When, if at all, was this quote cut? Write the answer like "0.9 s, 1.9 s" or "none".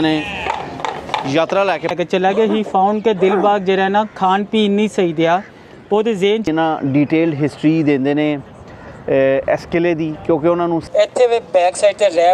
1.9 s, 6.5 s, 10.8 s